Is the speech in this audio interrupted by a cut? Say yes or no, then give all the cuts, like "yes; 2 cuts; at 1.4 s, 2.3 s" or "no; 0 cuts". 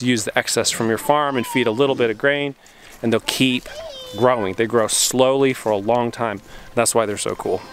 no; 0 cuts